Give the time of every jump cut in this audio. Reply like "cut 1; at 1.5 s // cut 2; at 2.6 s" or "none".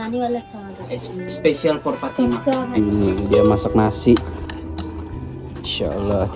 cut 1; at 2.8 s